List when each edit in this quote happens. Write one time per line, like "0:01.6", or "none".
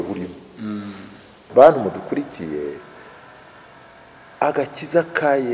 0:01.4

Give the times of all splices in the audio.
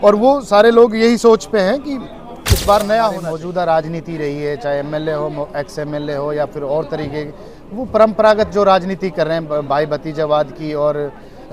0:03.3

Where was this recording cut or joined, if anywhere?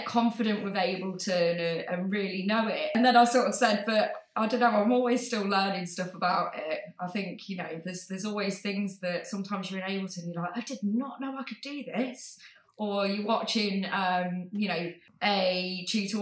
0:03.0
0:15.0

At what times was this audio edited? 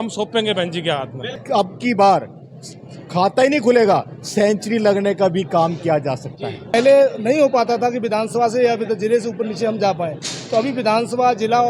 0:01.3
0:06.7

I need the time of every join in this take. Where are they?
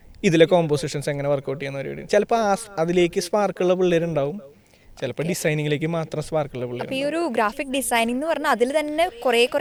none

